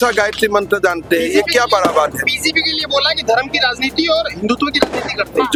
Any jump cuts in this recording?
no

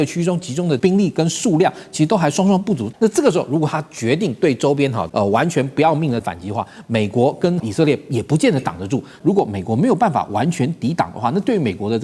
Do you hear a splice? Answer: yes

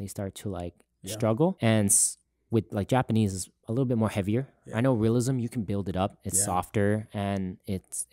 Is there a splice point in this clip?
yes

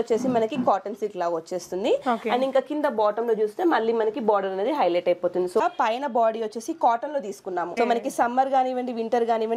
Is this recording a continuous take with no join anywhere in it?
no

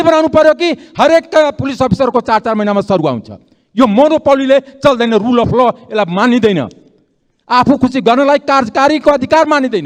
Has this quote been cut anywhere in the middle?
no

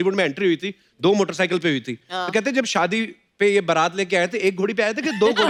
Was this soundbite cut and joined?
no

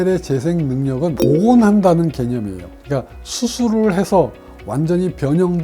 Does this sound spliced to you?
yes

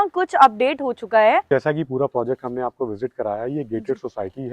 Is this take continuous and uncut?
no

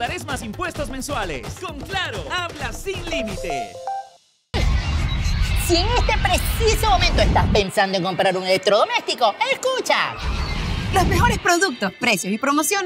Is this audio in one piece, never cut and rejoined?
no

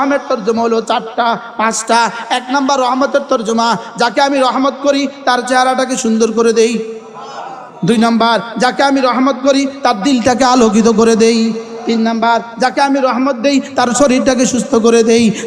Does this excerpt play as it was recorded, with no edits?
yes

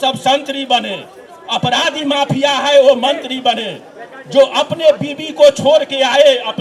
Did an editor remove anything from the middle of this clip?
no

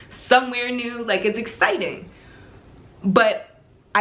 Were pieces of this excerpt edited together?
no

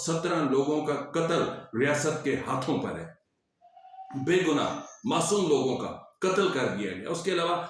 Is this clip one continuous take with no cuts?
yes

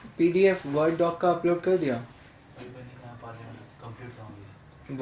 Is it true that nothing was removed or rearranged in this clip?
yes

